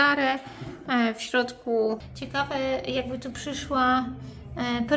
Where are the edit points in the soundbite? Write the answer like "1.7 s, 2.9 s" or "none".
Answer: 2.1 s